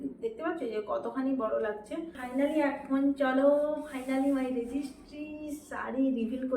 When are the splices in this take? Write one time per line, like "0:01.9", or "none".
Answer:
0:02.2